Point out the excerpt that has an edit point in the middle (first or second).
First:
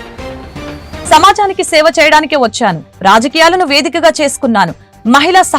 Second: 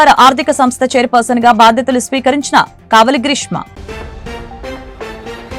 first